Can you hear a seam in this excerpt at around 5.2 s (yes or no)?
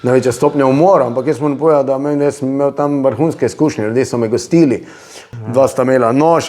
yes